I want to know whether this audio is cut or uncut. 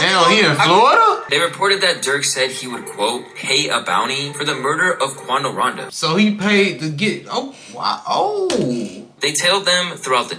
cut